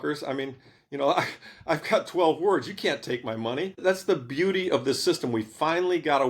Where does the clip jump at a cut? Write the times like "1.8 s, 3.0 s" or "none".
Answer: 3.8 s